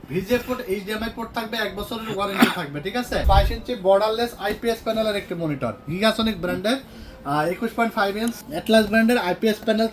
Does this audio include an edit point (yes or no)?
yes